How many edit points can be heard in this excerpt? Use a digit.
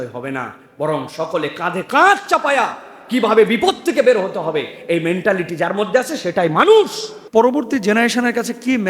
1